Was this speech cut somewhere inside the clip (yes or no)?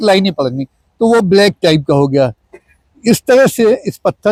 no